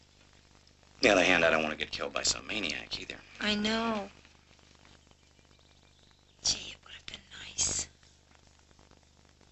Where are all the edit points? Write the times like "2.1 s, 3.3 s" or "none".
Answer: 4.5 s